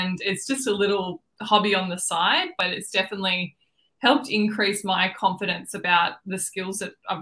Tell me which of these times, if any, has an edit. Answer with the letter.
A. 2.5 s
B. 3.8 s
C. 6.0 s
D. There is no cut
A